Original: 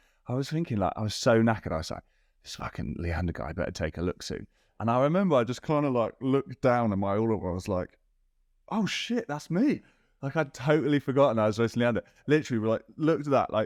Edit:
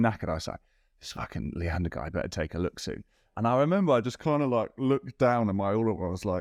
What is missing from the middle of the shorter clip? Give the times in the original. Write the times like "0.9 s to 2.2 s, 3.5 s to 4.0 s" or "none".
none